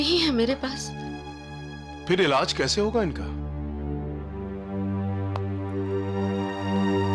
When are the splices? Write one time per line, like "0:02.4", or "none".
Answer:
none